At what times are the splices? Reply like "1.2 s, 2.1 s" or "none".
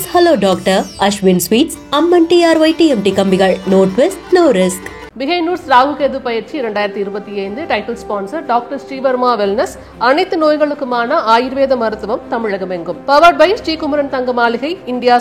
5.0 s